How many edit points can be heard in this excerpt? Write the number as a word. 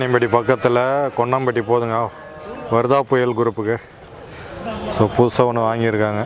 zero